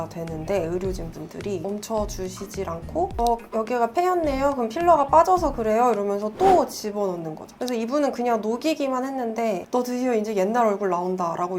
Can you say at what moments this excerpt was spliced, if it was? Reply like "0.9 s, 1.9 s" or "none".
7.4 s, 9.6 s